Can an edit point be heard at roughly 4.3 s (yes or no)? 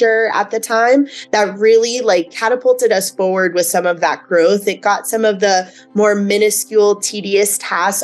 no